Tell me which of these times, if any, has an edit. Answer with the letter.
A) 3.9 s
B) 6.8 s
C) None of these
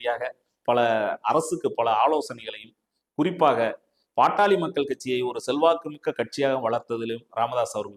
C